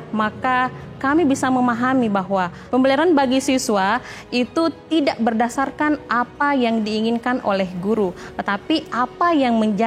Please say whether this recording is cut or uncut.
uncut